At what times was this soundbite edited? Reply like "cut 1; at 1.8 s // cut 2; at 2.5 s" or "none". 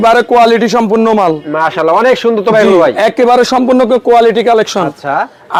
none

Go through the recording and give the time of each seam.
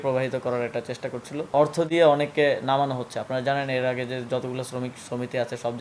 cut 1; at 1.5 s

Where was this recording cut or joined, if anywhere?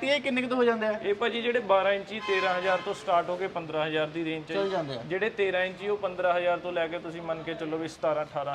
none

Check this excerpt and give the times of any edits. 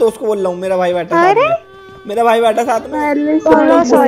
cut 1; at 2.9 s

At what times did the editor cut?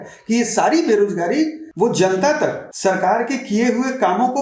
cut 1; at 1.6 s // cut 2; at 2.7 s

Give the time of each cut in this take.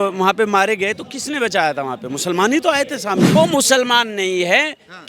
cut 1; at 3.3 s

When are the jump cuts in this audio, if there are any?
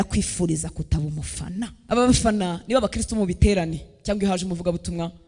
cut 1; at 1.8 s

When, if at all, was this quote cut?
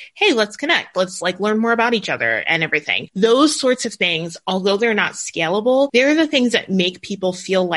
cut 1; at 3.0 s // cut 2; at 5.9 s

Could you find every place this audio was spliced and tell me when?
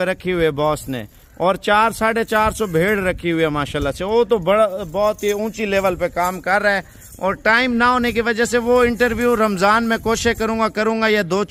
none

